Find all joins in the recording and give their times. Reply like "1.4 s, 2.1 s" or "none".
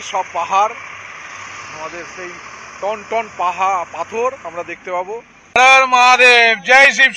5.5 s